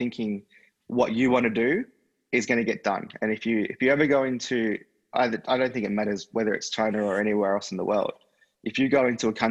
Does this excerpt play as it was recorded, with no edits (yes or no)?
yes